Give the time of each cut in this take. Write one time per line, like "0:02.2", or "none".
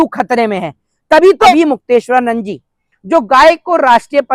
0:01.5